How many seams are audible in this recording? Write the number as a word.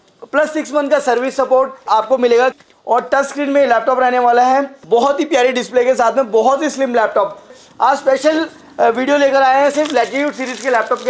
four